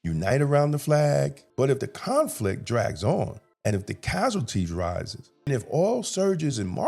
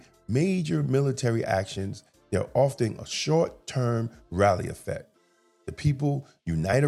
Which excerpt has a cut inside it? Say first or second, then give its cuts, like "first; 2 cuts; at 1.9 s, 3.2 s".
first; 3 cuts; at 1.4 s, 3.4 s, 5.5 s